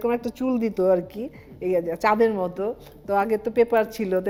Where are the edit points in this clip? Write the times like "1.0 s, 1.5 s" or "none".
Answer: none